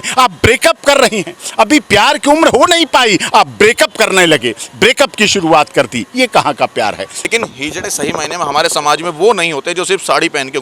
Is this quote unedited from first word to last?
no; 1 cut; at 7.3 s

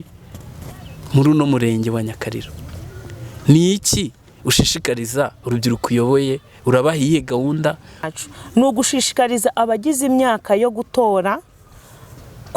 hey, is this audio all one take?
no; 1 cut; at 8.1 s

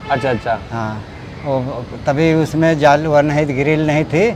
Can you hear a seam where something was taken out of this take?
no; 0 cuts

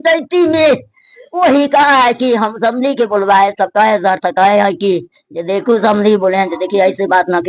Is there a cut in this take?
no; 0 cuts

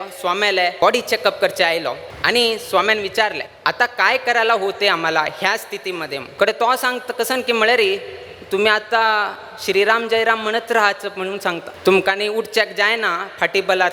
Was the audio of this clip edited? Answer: yes; 5 cuts; at 0.8 s, 2.1 s, 3.5 s, 6.2 s, 11.7 s

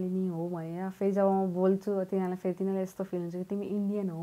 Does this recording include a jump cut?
no; 0 cuts

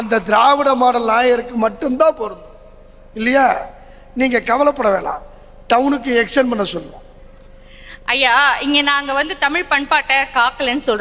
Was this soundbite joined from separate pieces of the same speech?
no; 0 cuts

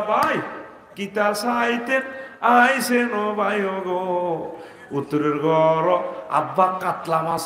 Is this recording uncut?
yes; 0 cuts

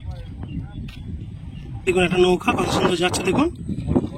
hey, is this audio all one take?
no; 1 cut; at 1.9 s

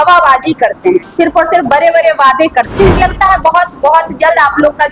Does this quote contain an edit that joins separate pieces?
yes; 1 cut; at 3.0 s

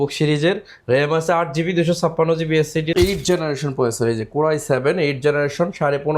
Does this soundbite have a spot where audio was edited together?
yes; 1 cut; at 2.9 s

